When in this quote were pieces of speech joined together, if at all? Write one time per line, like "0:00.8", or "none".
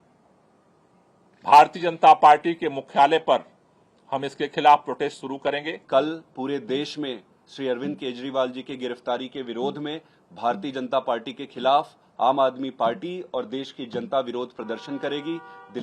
none